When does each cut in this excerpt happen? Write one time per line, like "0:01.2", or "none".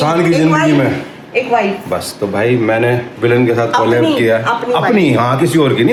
none